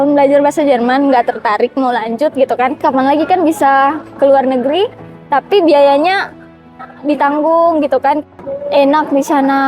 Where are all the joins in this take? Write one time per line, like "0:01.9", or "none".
0:02.8
0:08.2

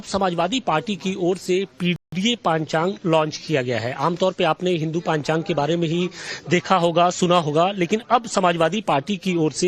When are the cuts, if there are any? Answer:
none

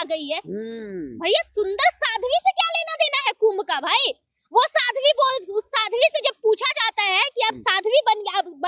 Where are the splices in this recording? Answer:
none

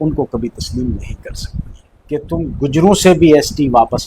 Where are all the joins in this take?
0:02.3

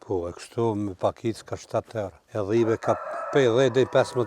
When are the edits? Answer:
0:02.2

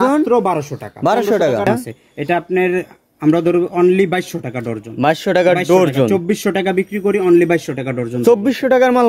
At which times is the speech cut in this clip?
0:01.7

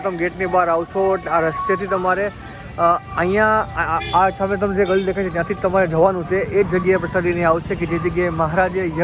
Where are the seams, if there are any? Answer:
none

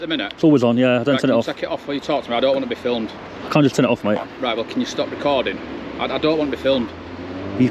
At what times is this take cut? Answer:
none

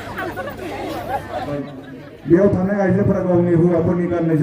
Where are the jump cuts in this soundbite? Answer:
0:01.6

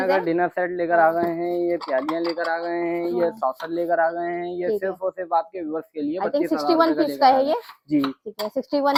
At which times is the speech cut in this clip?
none

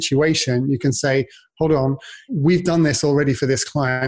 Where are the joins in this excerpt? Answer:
0:02.3

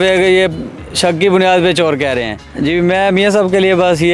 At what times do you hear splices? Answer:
0:02.4

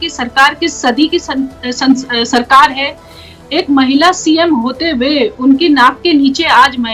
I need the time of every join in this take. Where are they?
none

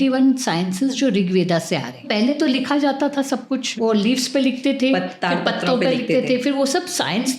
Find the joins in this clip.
0:02.0
0:03.7

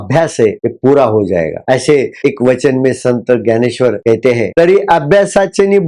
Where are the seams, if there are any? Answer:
none

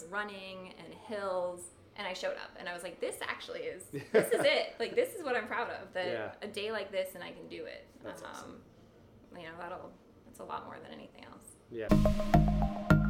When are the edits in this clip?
0:11.9

